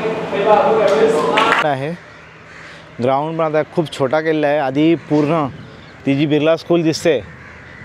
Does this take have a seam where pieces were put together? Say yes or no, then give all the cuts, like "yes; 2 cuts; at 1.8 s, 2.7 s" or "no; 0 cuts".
yes; 1 cut; at 1.6 s